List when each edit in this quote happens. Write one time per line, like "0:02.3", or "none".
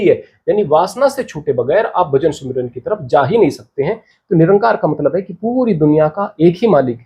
0:04.1